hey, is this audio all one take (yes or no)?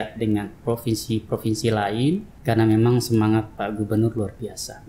no